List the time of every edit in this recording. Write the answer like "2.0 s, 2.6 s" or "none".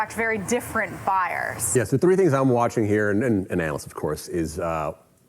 1.6 s